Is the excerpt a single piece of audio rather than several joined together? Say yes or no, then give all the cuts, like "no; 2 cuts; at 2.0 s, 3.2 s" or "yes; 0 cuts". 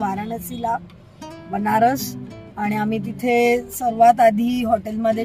yes; 0 cuts